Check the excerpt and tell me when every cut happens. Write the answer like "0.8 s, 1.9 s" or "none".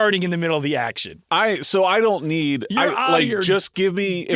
none

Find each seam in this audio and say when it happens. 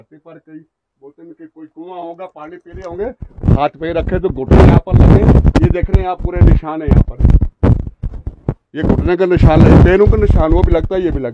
none

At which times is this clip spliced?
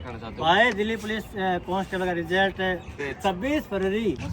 3.0 s

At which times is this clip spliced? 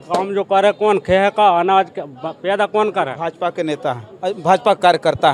none

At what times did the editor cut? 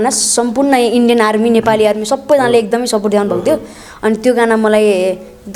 none

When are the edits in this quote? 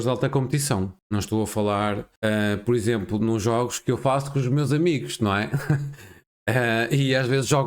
1.0 s, 2.1 s

